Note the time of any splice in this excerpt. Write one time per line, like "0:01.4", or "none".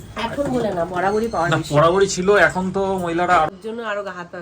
0:03.5

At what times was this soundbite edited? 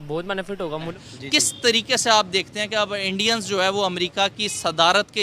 0:00.9

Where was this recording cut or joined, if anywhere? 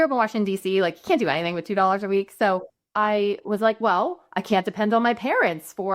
0:02.9

